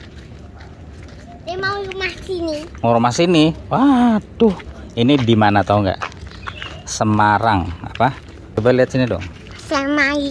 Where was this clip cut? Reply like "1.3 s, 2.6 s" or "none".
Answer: 8.5 s